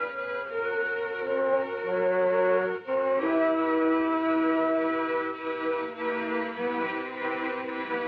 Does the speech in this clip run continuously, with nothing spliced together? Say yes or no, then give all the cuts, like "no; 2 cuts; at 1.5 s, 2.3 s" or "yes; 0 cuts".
no; 1 cut; at 5.6 s